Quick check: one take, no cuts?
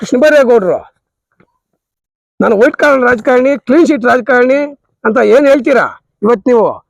yes; 0 cuts

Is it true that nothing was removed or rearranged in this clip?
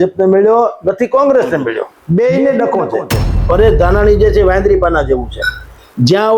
no; 2 cuts; at 1.9 s, 3.5 s

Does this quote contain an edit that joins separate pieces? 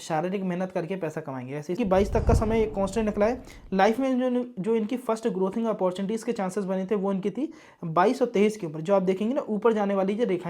yes; 1 cut; at 1.8 s

